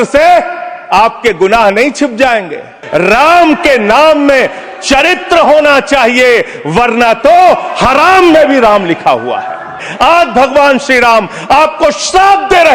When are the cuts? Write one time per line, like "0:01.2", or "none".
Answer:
0:02.8
0:09.9